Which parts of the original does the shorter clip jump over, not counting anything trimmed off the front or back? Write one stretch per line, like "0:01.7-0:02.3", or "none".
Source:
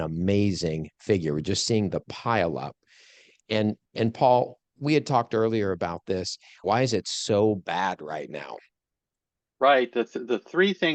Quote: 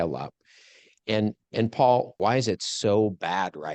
0:04.5-0:06.6